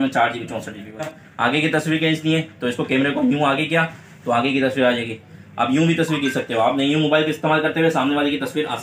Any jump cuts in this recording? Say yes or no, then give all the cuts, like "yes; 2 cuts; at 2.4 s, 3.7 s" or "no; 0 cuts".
yes; 1 cut; at 1.2 s